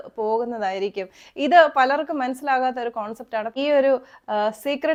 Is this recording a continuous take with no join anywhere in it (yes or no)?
yes